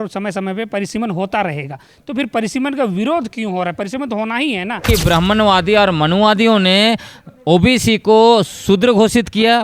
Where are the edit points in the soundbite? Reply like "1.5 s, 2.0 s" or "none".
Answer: 4.8 s